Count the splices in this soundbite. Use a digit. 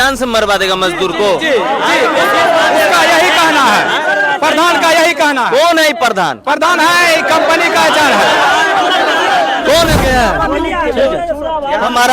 1